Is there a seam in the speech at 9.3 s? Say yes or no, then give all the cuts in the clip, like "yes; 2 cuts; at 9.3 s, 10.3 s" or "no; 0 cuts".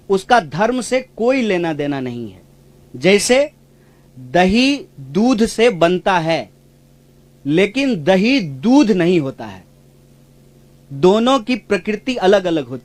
no; 0 cuts